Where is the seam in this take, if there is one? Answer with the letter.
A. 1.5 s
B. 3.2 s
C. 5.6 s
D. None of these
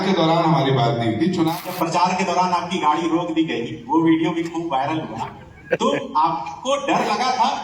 A